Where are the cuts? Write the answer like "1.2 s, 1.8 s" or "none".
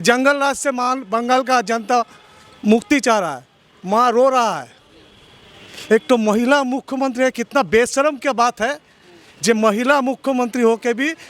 none